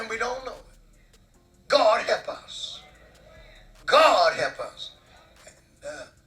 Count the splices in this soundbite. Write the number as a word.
one